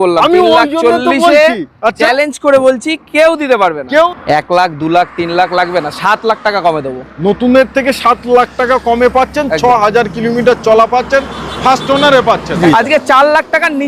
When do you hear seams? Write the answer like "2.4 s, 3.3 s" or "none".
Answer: 4.1 s, 12.6 s